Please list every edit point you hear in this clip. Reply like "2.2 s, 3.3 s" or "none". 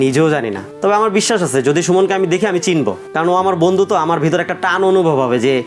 none